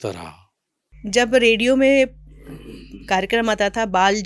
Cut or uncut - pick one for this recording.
cut